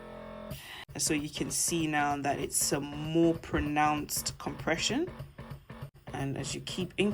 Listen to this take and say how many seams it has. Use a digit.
2